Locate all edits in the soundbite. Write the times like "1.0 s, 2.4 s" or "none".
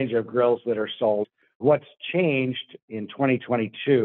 1.5 s, 2.8 s